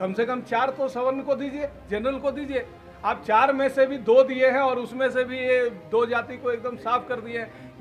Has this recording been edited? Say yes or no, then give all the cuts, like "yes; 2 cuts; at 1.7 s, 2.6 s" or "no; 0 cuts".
no; 0 cuts